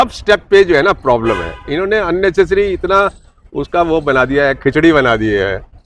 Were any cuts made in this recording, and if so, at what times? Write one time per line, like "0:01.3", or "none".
none